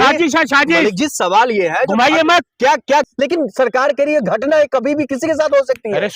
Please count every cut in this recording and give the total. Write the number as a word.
one